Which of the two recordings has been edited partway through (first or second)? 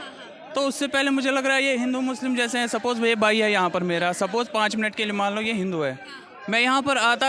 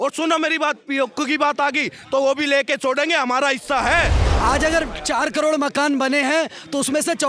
second